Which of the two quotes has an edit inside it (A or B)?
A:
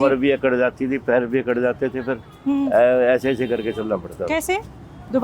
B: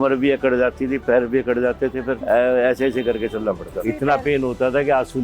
B